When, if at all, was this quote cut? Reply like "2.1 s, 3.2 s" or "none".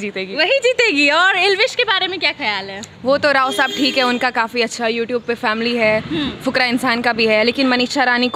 none